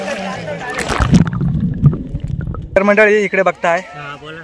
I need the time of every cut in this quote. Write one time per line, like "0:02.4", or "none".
0:02.8